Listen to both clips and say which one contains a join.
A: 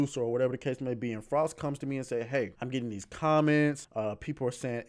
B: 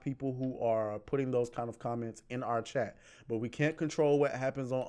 A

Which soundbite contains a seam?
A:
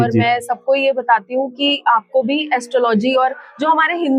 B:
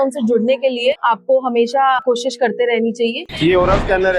B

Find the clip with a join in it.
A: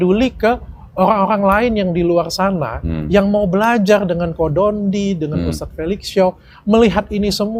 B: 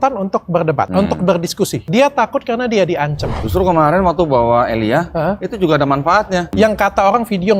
B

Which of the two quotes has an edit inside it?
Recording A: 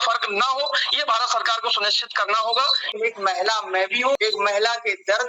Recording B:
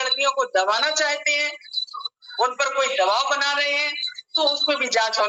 A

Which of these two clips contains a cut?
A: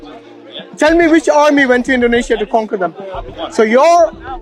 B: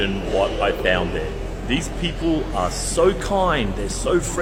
A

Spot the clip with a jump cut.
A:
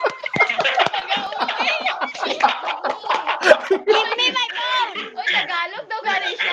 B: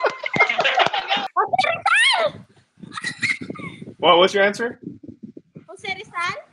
B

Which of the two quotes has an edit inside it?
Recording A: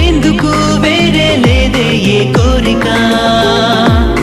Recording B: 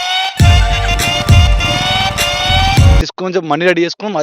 B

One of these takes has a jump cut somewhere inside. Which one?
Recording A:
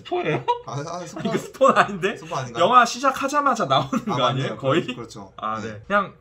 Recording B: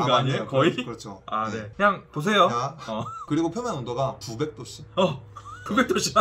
B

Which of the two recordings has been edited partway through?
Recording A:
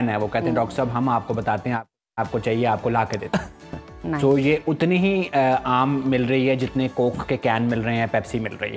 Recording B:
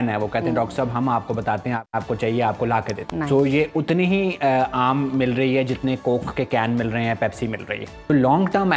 B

